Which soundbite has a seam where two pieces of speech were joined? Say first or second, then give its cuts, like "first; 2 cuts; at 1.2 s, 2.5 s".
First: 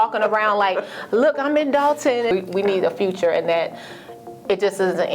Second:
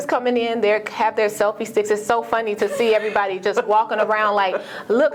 first; 1 cut; at 2.3 s